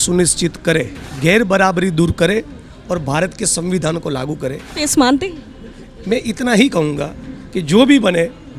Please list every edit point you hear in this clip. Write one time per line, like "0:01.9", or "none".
0:01.0
0:04.7